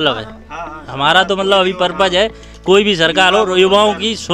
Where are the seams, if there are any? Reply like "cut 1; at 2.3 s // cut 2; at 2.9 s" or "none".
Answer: none